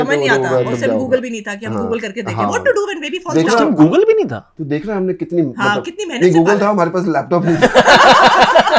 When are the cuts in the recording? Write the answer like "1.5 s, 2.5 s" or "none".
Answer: none